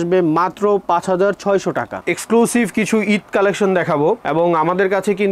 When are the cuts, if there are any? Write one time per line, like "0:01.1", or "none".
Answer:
0:01.9